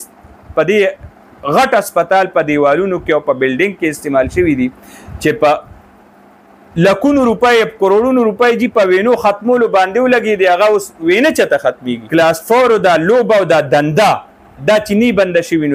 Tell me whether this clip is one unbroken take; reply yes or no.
no